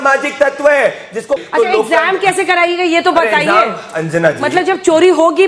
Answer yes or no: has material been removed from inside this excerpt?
yes